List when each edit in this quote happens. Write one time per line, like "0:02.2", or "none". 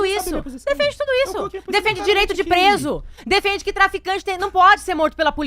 none